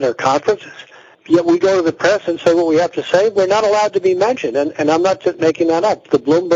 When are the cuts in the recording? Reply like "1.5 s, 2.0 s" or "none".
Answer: none